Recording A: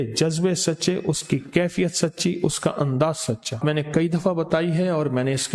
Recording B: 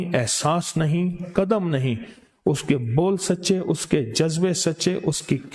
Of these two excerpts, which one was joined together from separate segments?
A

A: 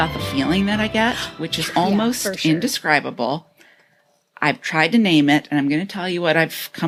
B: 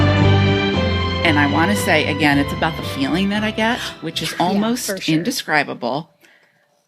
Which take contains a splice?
B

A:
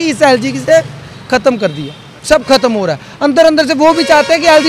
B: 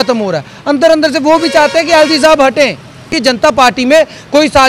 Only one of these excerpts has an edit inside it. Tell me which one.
B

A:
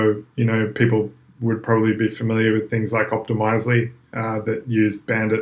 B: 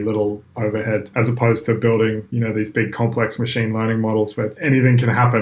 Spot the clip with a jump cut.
B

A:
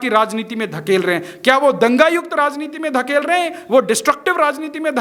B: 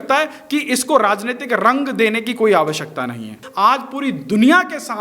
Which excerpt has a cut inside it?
B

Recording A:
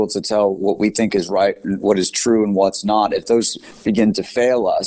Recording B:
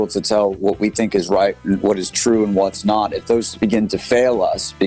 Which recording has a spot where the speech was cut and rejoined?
B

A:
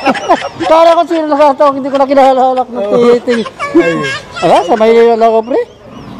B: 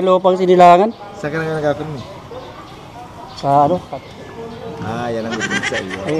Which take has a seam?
B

